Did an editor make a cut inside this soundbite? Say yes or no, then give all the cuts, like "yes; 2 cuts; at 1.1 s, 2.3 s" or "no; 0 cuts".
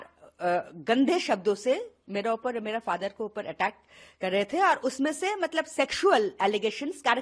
no; 0 cuts